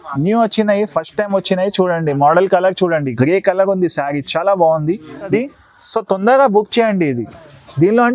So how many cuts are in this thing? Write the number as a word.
one